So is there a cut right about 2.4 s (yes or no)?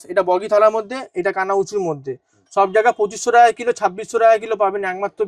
no